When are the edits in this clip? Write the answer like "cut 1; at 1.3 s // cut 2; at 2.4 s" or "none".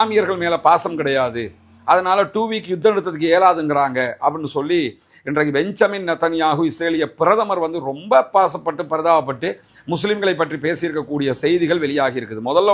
none